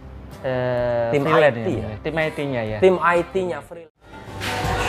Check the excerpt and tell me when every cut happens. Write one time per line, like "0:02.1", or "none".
0:03.7